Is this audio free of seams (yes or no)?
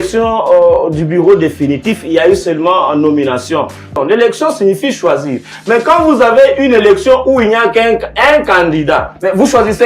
no